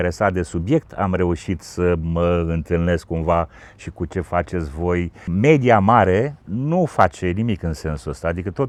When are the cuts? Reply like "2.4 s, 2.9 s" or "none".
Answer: none